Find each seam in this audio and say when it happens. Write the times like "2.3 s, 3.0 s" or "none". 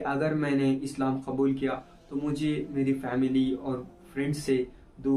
none